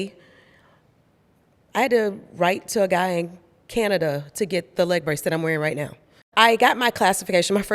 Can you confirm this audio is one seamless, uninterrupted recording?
no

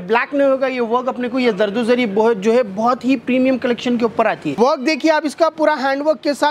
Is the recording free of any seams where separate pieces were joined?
no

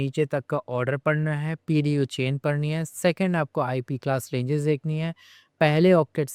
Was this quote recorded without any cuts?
yes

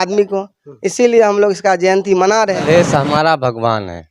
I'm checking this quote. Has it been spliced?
yes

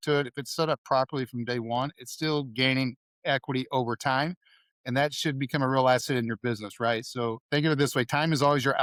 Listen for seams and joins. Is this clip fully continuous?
yes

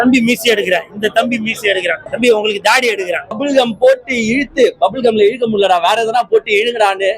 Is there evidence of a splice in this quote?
yes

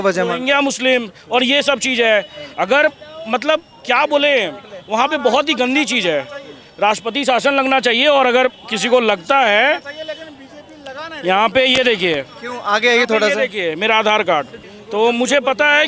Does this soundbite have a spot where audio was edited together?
no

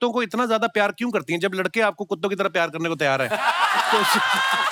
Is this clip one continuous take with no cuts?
yes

